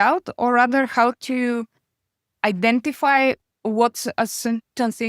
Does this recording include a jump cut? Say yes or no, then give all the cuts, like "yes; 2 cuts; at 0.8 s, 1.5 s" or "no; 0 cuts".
yes; 1 cut; at 3.4 s